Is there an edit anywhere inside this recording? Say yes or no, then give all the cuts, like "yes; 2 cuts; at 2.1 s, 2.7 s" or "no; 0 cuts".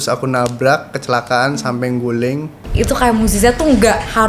yes; 1 cut; at 2.6 s